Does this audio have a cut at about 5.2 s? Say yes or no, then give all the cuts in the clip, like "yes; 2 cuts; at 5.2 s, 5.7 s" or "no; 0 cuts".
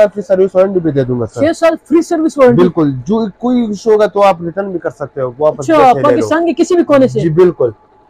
no; 0 cuts